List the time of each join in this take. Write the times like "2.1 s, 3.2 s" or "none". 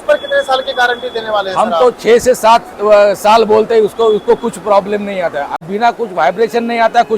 5.6 s

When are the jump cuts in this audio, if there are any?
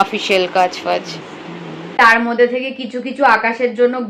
2.1 s

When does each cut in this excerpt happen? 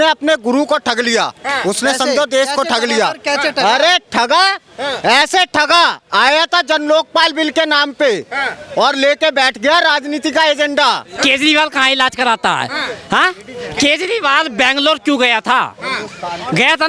11.1 s

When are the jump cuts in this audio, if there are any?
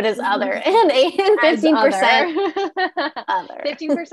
none

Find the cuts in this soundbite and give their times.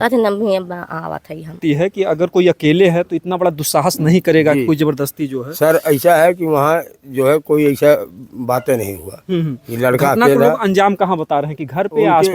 1.6 s

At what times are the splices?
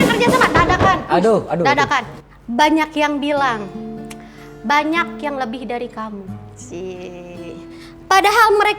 2.2 s

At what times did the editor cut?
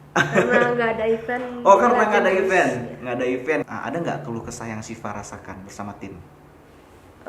3.6 s

